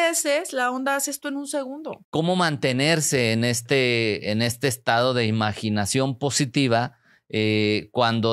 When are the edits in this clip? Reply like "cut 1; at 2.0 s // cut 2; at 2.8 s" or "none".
cut 1; at 1.9 s